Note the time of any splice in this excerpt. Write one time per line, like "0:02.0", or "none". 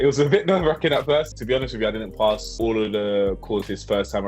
0:01.3
0:02.6